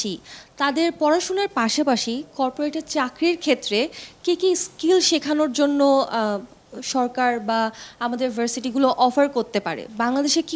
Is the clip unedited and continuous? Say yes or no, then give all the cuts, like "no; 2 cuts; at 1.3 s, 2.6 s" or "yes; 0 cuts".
yes; 0 cuts